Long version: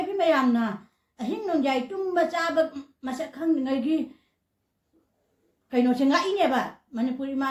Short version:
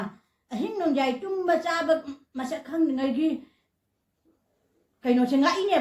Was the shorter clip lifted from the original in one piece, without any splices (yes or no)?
yes